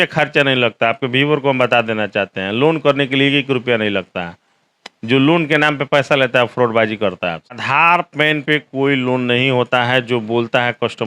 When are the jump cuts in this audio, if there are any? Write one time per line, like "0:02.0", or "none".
0:07.5